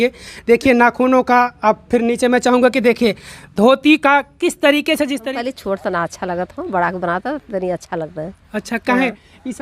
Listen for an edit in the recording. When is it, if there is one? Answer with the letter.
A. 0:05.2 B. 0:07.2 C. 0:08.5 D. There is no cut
A